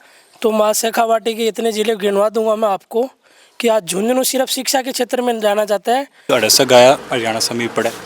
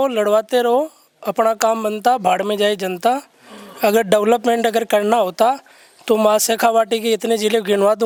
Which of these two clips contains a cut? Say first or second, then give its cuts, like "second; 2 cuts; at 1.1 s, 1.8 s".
first; 1 cut; at 6.2 s